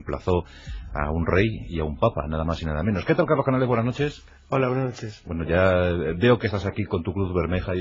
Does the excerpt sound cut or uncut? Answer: cut